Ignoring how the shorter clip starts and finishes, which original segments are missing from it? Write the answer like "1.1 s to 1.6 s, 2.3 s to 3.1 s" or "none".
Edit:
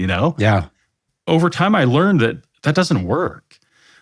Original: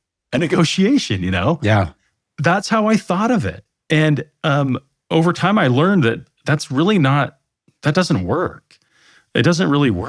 2.3 s to 4.9 s, 6.3 s to 7.7 s